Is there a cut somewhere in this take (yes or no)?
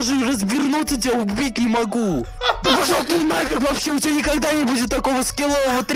yes